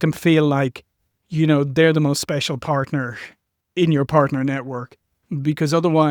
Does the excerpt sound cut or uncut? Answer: uncut